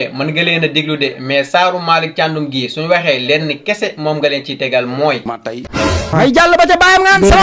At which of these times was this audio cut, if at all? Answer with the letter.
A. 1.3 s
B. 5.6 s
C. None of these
B